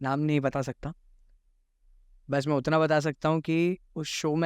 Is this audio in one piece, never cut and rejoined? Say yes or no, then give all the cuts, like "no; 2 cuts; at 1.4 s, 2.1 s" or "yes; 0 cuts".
yes; 0 cuts